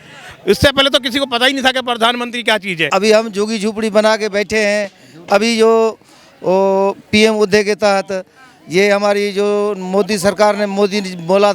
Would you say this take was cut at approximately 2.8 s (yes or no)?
yes